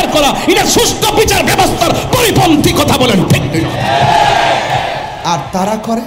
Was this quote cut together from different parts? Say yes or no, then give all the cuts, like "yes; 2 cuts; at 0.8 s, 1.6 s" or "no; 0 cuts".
yes; 1 cut; at 4.8 s